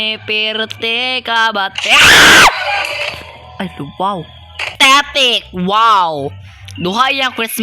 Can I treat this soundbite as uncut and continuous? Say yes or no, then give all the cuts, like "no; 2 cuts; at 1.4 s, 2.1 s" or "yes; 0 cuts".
no; 1 cut; at 4.7 s